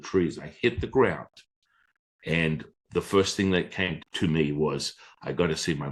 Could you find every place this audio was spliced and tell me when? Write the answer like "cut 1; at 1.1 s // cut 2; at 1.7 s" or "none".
cut 1; at 4.0 s